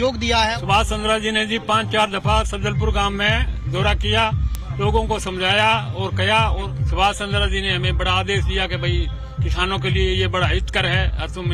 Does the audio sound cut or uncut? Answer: uncut